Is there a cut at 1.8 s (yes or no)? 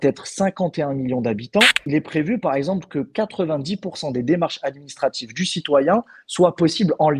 yes